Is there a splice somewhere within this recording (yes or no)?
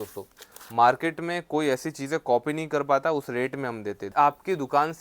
yes